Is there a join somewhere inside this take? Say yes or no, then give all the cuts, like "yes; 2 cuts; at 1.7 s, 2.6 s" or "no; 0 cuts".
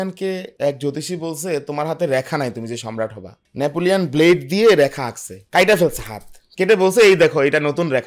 no; 0 cuts